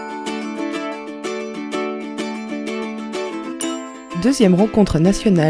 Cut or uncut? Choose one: cut